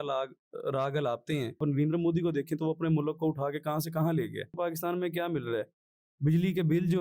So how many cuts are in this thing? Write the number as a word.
two